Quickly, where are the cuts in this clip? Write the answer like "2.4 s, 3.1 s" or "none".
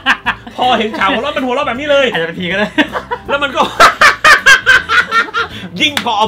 none